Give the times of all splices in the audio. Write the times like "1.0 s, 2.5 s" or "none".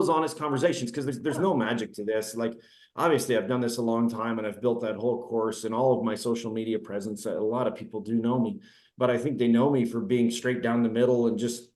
none